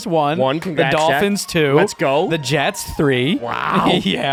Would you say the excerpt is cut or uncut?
uncut